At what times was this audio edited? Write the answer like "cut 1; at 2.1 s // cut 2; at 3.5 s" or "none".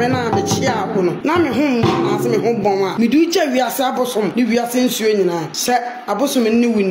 cut 1; at 1.2 s // cut 2; at 2.9 s // cut 3; at 4.3 s // cut 4; at 5.5 s